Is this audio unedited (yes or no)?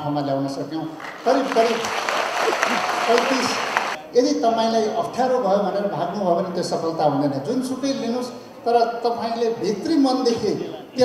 no